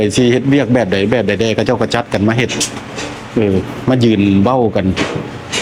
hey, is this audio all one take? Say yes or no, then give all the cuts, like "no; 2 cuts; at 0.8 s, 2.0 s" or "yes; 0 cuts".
yes; 0 cuts